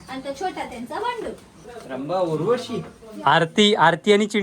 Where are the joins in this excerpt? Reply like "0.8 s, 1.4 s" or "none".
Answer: none